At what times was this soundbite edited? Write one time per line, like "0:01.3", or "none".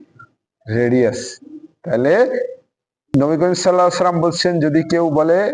0:03.0